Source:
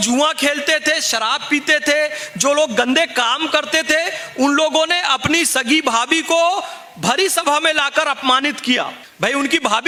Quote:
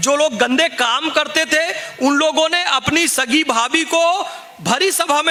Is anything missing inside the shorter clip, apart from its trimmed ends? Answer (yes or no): no